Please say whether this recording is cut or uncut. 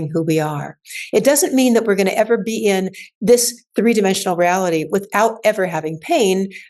uncut